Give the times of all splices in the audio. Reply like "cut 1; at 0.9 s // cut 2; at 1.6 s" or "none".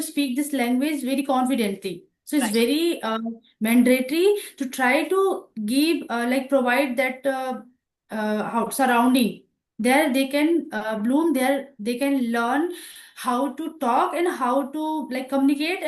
none